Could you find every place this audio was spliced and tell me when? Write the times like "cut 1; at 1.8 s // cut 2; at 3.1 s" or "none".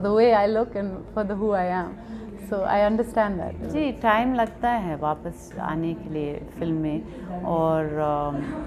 cut 1; at 3.7 s